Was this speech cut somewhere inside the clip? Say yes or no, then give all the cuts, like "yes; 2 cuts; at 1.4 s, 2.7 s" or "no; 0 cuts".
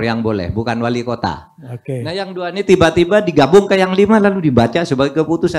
no; 0 cuts